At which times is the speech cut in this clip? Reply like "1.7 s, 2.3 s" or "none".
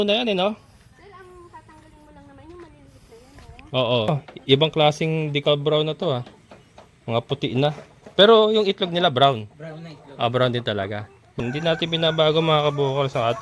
4.1 s, 11.4 s